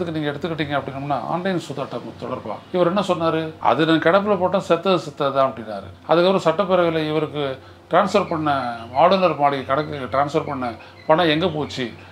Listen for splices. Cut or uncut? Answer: uncut